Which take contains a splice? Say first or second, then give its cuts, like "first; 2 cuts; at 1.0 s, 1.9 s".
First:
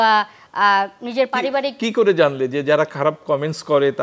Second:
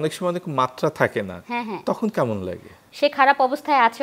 second; 1 cut; at 2.8 s